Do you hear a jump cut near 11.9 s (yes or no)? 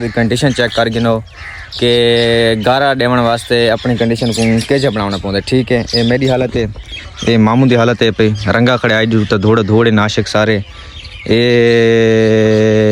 no